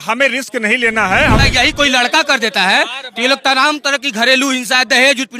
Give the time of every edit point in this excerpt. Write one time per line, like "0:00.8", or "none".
0:01.4